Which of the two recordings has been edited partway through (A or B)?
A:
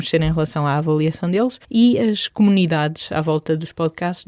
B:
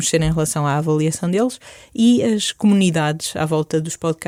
A